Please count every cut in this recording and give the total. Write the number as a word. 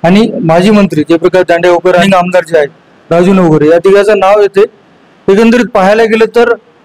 one